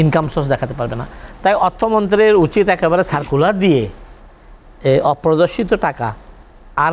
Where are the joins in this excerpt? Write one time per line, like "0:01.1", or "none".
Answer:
none

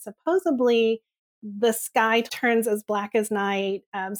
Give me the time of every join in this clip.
0:02.3

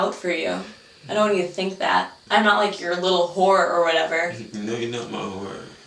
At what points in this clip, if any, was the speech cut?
0:02.2

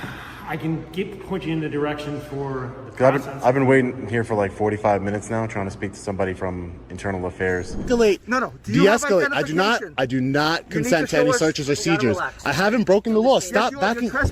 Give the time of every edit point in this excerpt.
0:07.8

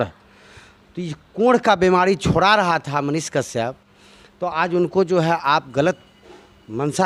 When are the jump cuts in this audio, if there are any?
none

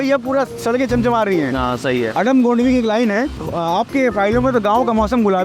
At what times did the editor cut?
0:03.4

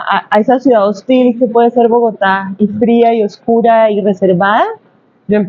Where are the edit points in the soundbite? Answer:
none

